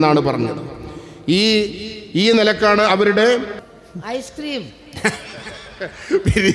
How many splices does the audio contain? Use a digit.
1